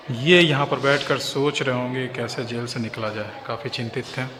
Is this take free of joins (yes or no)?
yes